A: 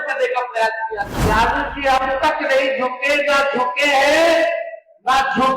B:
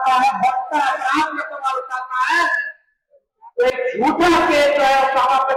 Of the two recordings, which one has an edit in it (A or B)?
A